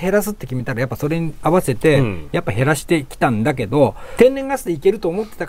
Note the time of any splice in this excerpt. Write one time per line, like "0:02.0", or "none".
0:02.8
0:04.0

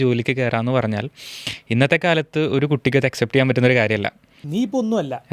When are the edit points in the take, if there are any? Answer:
0:04.3

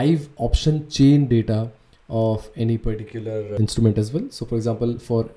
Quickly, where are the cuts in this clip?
0:03.5

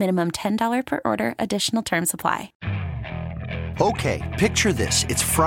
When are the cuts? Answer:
0:02.5

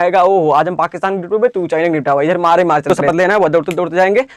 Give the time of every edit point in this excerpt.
0:03.0

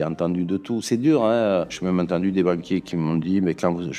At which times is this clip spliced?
0:01.8

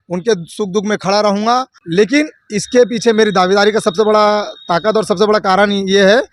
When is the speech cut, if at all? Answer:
0:01.8

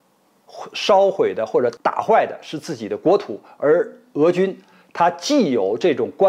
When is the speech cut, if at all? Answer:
0:01.8

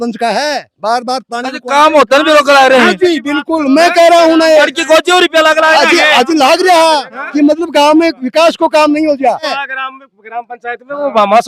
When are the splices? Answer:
0:09.5

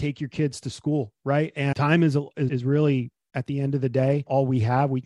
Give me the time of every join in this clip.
0:01.7
0:02.5

